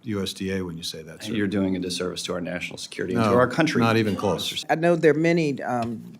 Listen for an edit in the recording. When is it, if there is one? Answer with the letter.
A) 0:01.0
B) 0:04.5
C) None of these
B